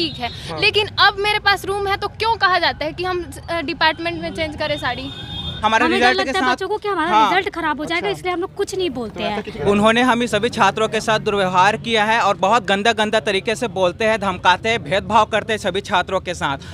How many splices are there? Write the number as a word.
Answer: two